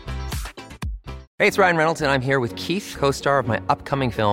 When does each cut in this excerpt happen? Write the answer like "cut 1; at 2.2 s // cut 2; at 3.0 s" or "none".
cut 1; at 1.2 s